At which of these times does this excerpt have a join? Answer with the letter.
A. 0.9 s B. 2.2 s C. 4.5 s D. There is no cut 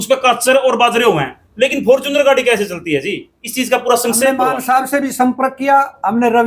C